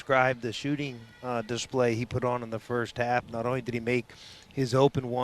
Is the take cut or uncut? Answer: uncut